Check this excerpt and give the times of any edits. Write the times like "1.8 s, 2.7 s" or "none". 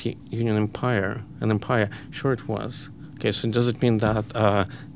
none